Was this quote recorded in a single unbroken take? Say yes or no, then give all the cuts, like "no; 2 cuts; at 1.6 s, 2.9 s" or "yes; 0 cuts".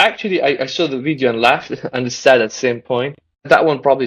yes; 0 cuts